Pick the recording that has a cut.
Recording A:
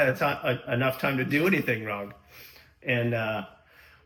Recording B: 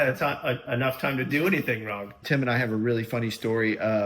B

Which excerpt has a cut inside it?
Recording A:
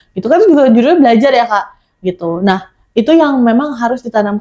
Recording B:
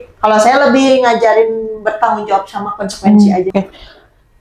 B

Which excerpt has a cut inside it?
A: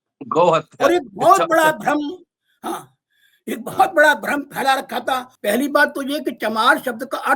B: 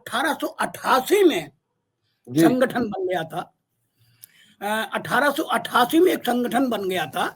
A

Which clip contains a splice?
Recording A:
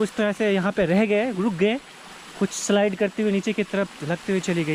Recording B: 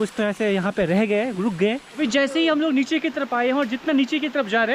B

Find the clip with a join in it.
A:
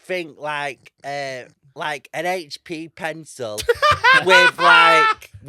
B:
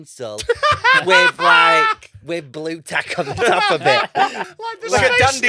B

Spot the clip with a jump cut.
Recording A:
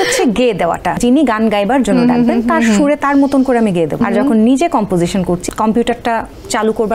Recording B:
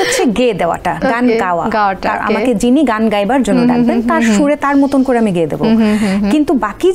A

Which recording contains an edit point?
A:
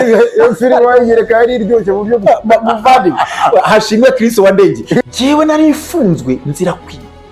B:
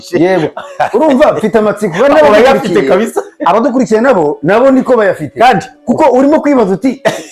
A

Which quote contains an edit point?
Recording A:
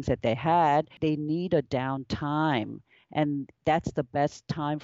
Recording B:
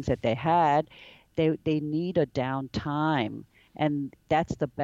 A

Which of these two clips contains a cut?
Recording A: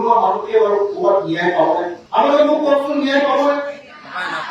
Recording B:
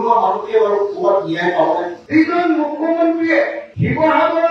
B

